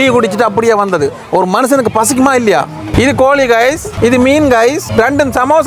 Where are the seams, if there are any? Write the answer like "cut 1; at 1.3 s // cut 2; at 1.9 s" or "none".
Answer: cut 1; at 2.9 s // cut 2; at 3.9 s // cut 3; at 4.8 s